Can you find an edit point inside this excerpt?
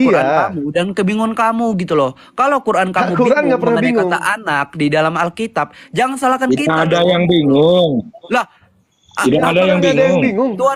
no; 0 cuts

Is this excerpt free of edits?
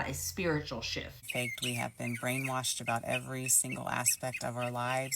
no; 1 cut; at 1.2 s

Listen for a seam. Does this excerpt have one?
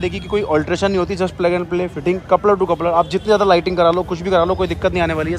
no; 0 cuts

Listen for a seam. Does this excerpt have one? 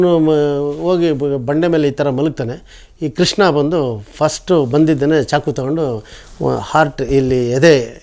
no; 0 cuts

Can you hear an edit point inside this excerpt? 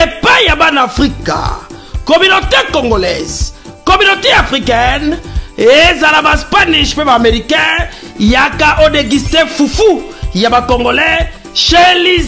no; 0 cuts

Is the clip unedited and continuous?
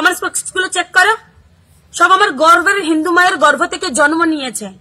no; 2 cuts; at 1.2 s, 2.9 s

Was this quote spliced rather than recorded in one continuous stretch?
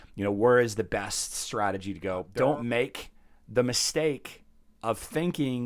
yes; 1 cut; at 2.3 s

